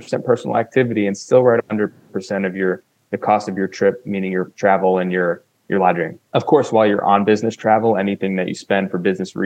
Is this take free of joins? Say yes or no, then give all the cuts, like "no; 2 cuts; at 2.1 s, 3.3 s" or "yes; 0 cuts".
no; 2 cuts; at 4.5 s, 6.1 s